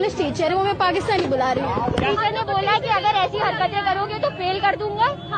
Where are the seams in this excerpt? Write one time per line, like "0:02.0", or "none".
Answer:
0:02.1